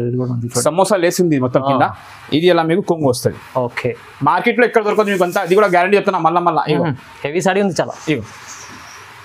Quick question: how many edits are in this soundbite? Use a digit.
0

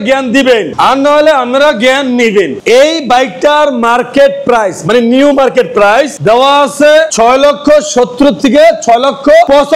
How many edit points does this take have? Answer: 1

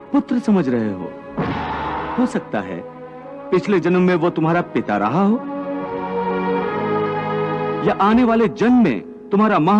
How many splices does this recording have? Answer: 1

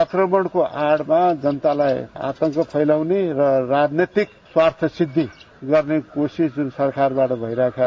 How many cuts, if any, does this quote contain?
1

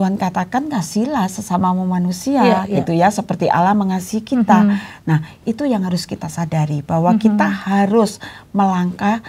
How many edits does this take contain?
0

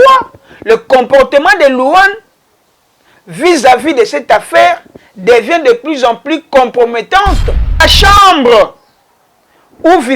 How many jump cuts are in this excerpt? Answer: 1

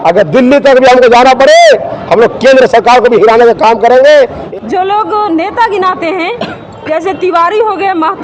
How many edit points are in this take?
1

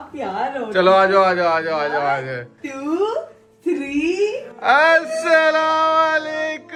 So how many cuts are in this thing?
0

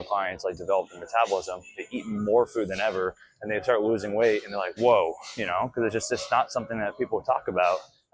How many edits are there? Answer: 1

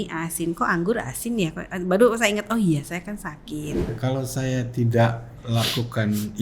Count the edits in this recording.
1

